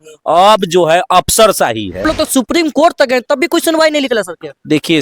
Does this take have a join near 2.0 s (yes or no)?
yes